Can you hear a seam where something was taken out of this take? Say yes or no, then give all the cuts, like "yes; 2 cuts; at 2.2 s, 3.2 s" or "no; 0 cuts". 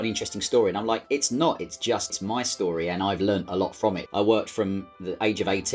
yes; 3 cuts; at 2.1 s, 4.0 s, 4.9 s